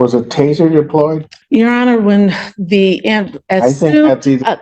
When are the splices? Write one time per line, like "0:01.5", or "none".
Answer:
0:01.3

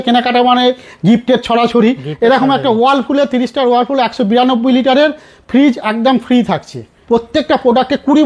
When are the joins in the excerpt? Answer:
0:06.9

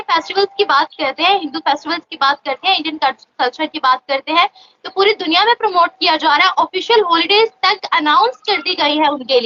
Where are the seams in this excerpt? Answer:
none

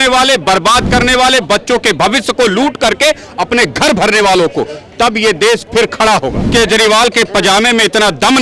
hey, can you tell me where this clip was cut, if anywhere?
0:06.4

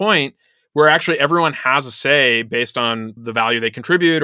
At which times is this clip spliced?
0:03.2

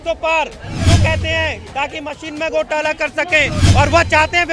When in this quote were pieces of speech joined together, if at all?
0:03.6

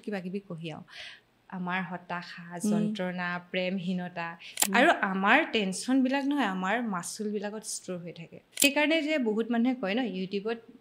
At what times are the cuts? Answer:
0:04.6
0:08.6

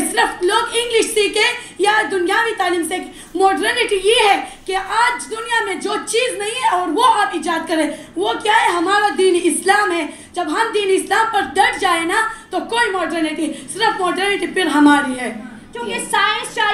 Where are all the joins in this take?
0:15.7

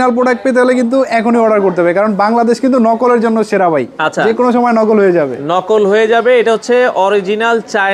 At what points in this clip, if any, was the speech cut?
none

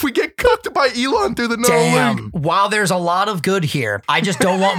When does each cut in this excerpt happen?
0:02.3
0:04.0

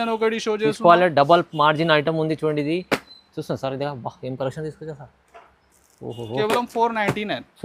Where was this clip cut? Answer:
none

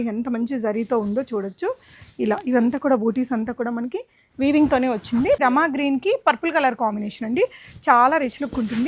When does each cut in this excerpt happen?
0:05.4

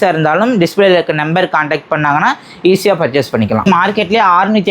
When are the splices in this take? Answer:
0:03.7

